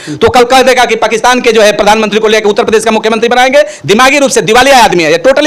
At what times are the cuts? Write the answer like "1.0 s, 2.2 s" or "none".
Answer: none